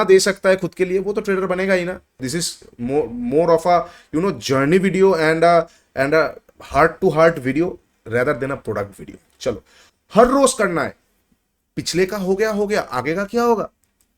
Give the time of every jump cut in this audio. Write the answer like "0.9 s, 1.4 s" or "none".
2.1 s, 9.8 s